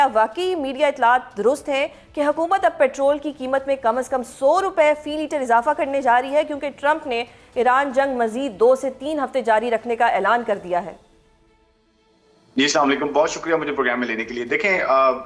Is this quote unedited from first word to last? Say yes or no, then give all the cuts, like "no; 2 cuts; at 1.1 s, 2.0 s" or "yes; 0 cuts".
yes; 0 cuts